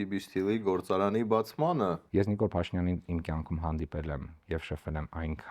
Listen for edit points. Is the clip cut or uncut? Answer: cut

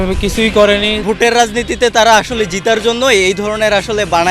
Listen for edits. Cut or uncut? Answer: cut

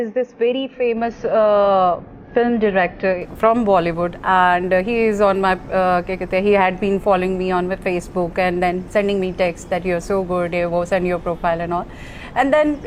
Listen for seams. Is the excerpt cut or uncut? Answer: uncut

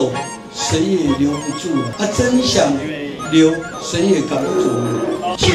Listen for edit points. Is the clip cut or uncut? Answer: cut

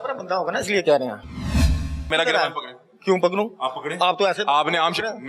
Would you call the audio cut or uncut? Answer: cut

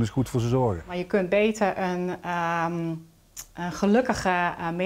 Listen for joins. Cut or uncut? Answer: cut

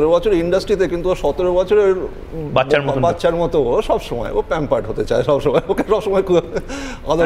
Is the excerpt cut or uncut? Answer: uncut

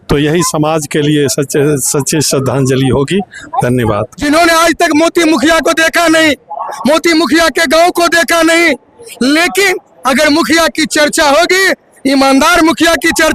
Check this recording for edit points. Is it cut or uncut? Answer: cut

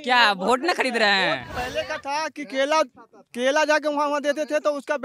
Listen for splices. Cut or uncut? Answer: cut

